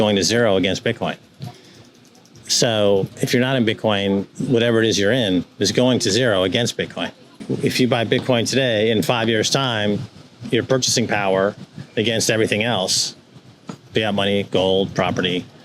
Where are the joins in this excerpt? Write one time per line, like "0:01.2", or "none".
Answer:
0:07.4